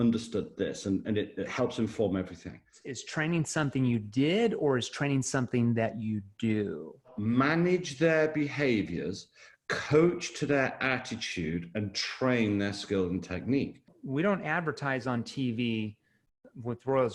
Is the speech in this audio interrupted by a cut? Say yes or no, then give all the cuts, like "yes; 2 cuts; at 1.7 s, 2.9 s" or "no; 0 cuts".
yes; 3 cuts; at 2.8 s, 7.1 s, 13.9 s